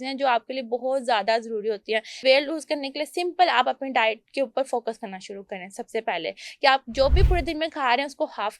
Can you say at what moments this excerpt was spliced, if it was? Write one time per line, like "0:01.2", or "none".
0:02.2